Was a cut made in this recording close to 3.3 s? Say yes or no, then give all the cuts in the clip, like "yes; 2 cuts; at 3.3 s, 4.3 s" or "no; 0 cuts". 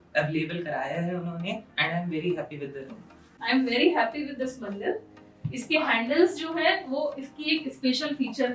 yes; 1 cut; at 3.3 s